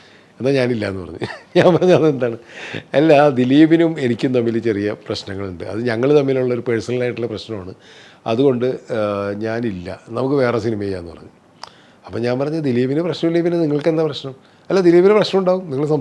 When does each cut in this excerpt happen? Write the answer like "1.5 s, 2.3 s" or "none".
none